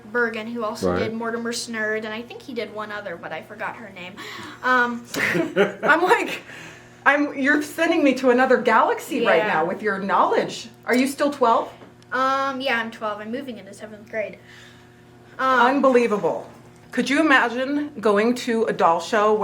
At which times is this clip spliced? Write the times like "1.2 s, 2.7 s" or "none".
16.7 s